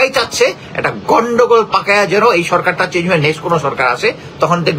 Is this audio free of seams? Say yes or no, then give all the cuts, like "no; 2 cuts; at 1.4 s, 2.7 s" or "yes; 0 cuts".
yes; 0 cuts